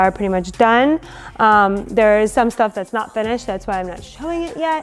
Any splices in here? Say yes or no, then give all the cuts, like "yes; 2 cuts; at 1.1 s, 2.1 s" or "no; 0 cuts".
no; 0 cuts